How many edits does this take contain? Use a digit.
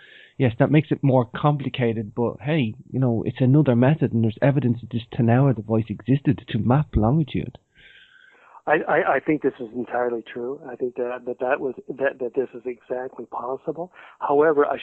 0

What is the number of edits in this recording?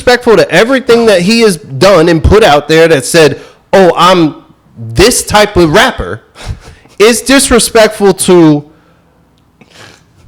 0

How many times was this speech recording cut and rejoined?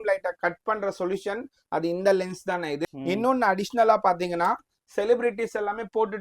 1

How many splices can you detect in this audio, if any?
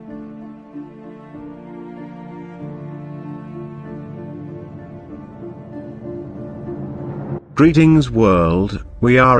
0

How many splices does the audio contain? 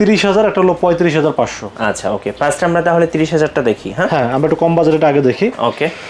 0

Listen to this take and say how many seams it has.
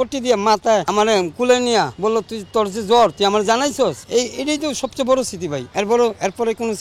4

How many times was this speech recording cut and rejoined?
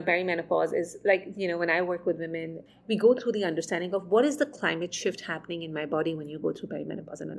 1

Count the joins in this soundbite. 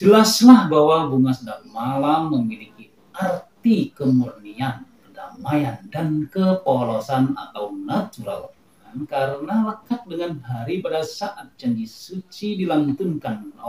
1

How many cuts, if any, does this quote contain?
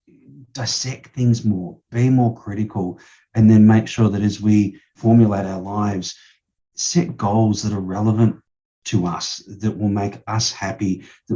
1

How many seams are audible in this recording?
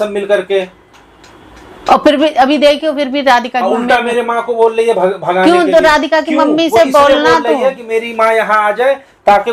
0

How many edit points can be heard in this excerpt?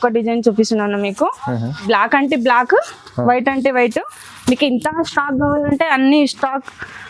1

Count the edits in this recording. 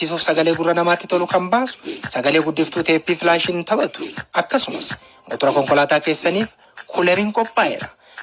0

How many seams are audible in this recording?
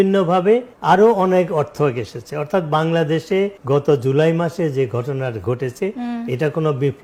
0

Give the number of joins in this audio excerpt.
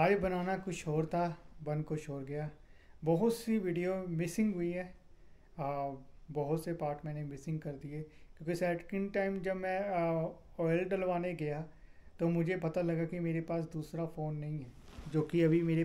0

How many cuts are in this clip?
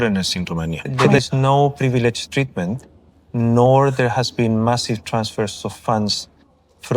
1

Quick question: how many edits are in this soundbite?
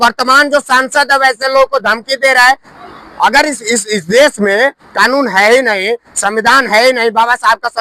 1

